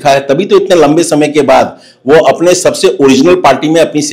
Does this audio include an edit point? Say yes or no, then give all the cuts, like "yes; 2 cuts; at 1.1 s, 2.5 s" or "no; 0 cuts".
no; 0 cuts